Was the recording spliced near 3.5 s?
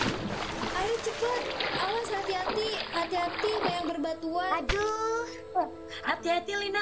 no; 1 cut; at 5.1 s

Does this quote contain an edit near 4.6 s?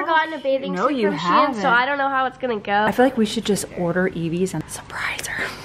yes; 2 cuts; at 2.9 s, 4.6 s

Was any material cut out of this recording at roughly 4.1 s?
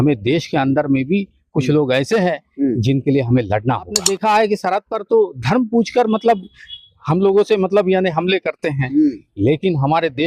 yes; 1 cut; at 4.1 s

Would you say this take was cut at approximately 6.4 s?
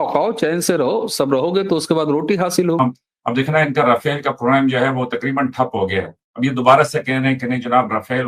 no; 1 cut; at 2.8 s

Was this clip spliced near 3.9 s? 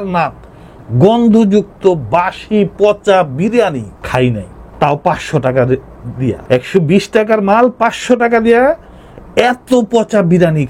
no; 0 cuts

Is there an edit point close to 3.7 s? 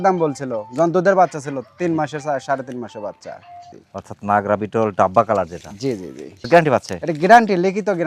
yes; 2 cuts; at 3.7 s, 6.3 s

